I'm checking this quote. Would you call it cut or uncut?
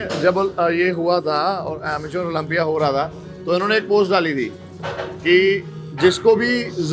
uncut